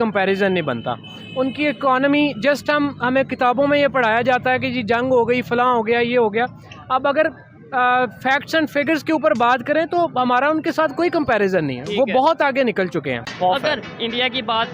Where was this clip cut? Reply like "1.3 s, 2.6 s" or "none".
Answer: 13.3 s